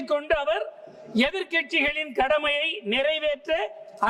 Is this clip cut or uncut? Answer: uncut